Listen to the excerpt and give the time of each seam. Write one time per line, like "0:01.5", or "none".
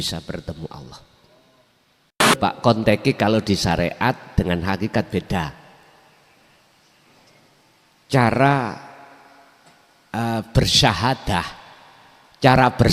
0:02.4